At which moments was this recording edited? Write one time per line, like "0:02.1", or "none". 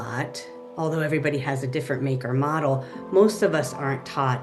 none